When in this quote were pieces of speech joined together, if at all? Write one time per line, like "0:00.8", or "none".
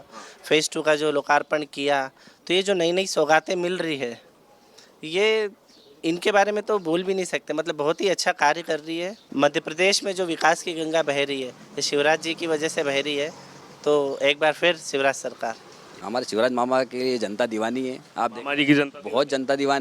0:09.2
0:16.0